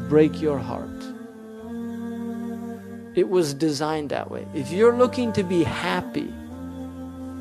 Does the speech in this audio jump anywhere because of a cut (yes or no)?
no